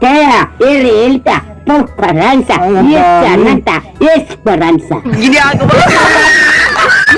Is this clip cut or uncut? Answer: uncut